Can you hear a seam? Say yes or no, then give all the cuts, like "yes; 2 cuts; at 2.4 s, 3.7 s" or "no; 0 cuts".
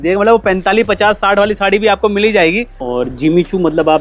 yes; 1 cut; at 2.7 s